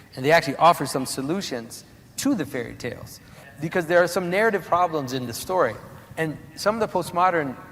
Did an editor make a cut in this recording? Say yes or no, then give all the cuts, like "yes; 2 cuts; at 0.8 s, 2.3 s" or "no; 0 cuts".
yes; 1 cut; at 3.4 s